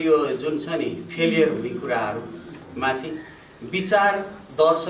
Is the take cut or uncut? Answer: uncut